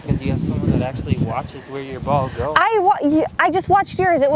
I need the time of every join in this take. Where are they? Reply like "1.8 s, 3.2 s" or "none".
none